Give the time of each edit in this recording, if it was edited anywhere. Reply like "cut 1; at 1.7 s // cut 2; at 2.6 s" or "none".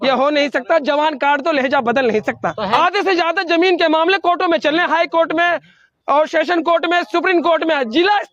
cut 1; at 2.7 s